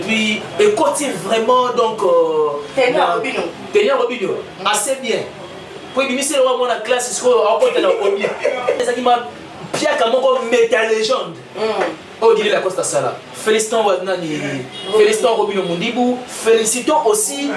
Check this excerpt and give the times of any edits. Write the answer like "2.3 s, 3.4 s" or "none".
8.8 s